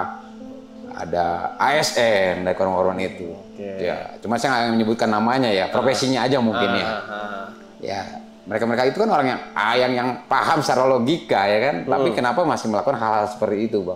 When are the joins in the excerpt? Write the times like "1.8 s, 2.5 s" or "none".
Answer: none